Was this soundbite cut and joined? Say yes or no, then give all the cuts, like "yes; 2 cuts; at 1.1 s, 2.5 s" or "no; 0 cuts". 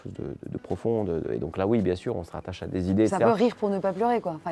no; 0 cuts